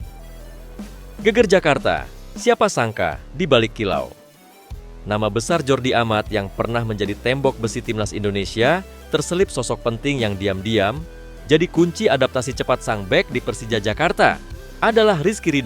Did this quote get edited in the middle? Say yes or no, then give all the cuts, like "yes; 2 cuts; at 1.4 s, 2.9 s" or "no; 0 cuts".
yes; 1 cut; at 1.2 s